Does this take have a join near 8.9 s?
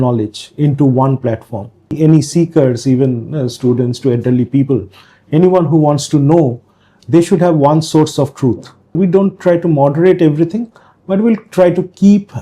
yes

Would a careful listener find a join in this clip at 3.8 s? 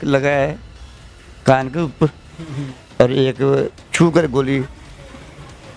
no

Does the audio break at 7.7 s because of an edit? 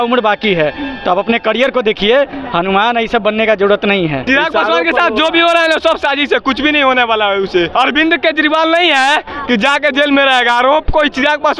yes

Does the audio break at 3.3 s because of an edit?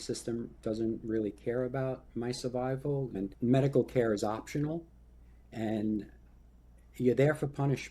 yes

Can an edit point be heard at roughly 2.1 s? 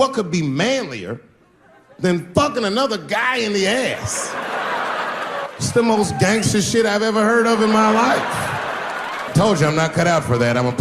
no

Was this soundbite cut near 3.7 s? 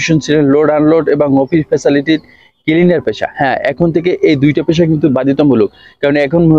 no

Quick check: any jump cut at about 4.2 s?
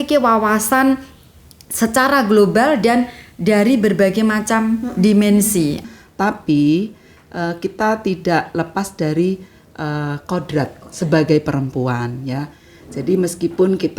no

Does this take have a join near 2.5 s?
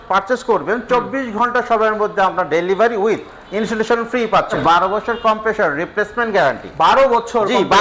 no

